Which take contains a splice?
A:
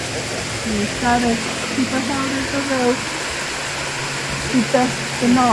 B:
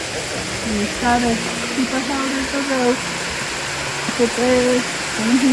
B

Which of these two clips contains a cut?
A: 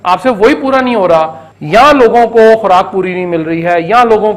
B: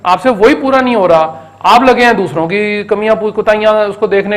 A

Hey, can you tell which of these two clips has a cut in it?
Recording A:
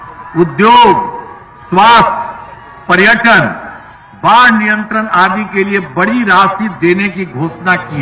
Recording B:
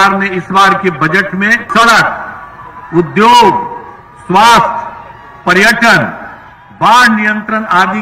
B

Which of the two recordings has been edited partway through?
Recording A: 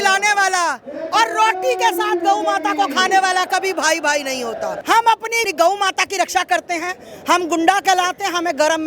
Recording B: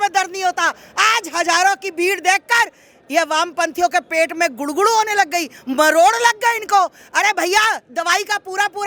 A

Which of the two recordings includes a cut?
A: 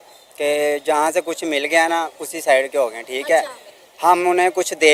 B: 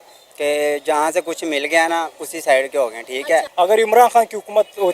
B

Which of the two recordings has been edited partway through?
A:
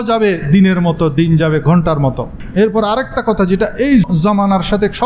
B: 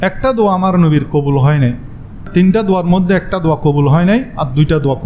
A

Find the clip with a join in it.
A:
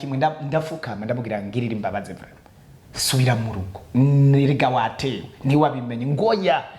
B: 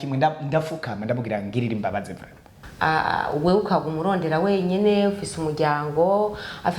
B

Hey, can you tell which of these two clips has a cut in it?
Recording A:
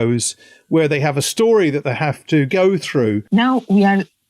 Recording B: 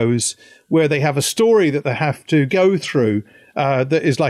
A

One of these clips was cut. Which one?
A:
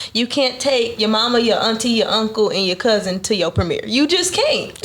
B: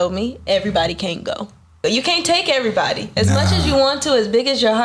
B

